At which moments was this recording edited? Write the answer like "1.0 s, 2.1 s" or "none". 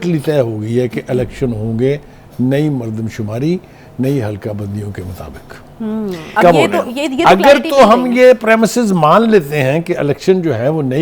6.2 s